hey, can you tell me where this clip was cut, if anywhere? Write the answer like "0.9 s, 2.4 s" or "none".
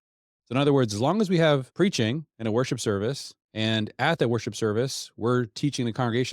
1.7 s